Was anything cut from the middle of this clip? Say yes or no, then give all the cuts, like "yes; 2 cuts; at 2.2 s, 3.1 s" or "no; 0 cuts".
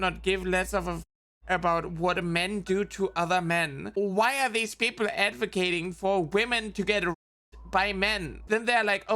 yes; 2 cuts; at 3.9 s, 8.3 s